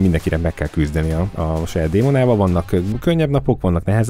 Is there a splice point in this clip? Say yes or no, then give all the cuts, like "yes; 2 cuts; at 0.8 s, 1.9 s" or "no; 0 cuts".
no; 0 cuts